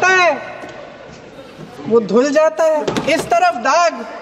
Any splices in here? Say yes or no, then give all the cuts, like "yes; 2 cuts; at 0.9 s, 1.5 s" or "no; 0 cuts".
yes; 1 cut; at 2.9 s